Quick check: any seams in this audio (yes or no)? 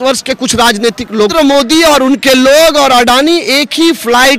yes